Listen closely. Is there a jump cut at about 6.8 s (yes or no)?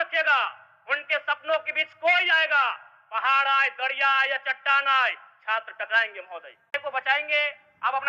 yes